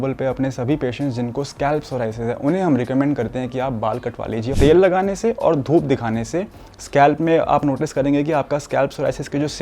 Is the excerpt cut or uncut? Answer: cut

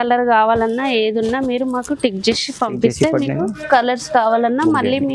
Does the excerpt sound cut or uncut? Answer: uncut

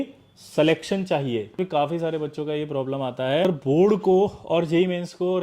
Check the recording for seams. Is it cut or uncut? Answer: cut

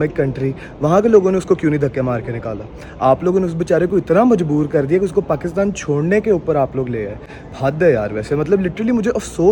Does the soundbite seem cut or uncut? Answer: uncut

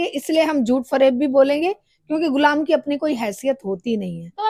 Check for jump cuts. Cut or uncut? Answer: uncut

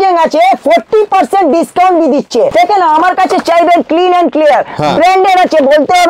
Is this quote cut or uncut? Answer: cut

